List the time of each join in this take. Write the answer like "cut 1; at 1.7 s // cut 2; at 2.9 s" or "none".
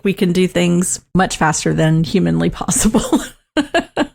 cut 1; at 1.0 s